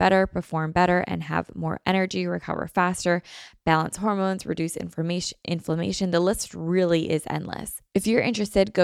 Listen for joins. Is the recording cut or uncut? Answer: cut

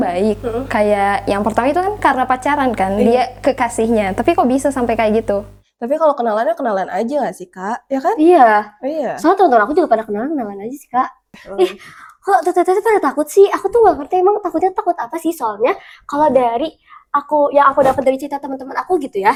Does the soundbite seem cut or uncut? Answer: uncut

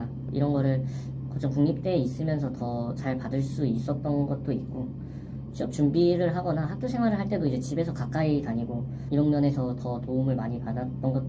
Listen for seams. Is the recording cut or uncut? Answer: uncut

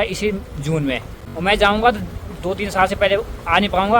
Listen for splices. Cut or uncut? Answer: cut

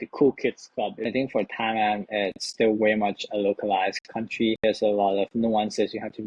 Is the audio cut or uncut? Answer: cut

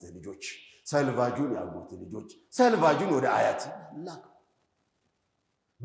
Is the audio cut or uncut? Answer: uncut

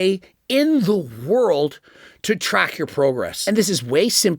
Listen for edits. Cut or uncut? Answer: cut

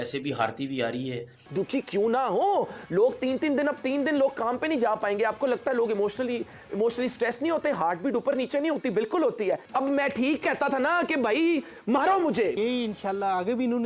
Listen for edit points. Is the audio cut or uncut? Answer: cut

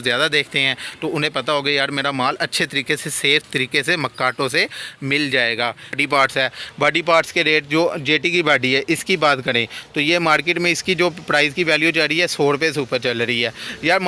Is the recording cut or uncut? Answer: cut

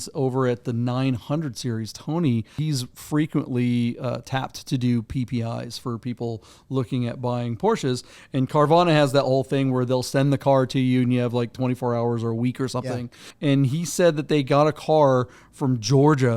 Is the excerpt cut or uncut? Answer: cut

